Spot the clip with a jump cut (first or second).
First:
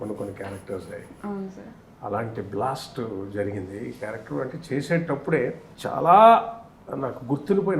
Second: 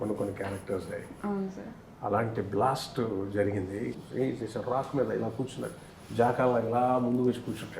second